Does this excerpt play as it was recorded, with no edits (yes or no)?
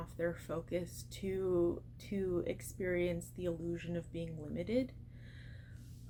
yes